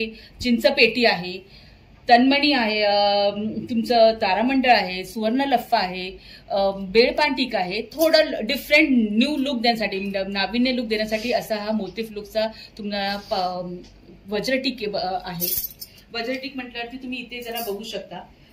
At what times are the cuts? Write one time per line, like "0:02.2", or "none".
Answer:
none